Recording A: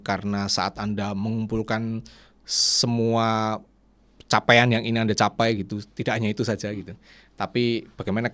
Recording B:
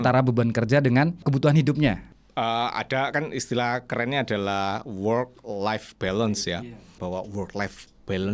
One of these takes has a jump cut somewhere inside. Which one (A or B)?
B